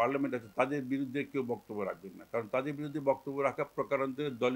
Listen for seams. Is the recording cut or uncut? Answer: uncut